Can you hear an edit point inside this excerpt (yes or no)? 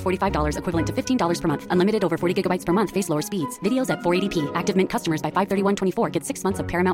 no